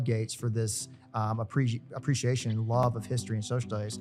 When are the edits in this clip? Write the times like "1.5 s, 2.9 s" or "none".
none